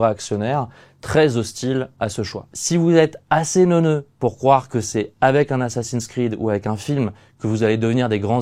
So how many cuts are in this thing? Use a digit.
1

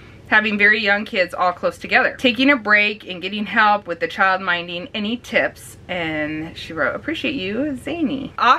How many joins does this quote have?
0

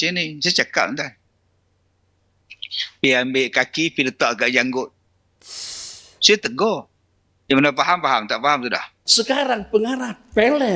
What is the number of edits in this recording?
1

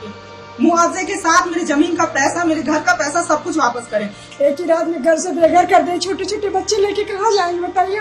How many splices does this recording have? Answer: 1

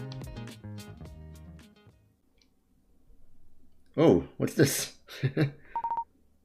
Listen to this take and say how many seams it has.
1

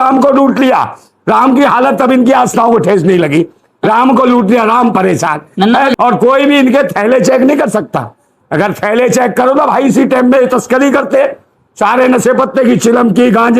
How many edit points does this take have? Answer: 1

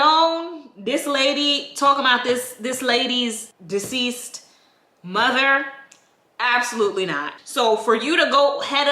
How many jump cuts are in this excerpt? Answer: 2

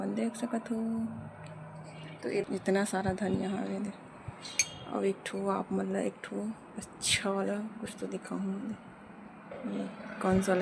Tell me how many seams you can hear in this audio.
1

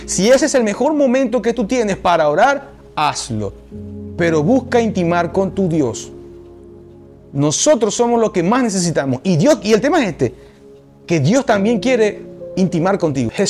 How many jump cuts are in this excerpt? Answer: 0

